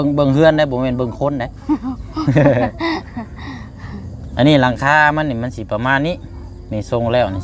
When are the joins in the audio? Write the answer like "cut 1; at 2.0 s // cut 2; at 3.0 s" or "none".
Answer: none